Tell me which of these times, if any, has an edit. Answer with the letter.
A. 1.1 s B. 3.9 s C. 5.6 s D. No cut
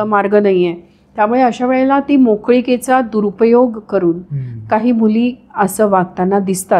D